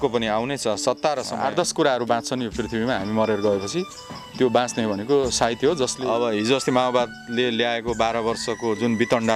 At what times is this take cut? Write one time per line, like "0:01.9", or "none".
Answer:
0:01.3
0:06.0